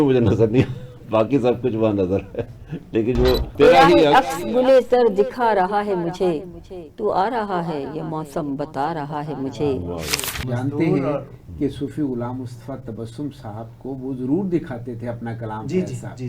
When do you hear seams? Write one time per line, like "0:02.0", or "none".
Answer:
0:03.5
0:10.3